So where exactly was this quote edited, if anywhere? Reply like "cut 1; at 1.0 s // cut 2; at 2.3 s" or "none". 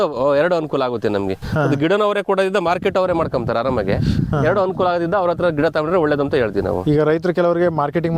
none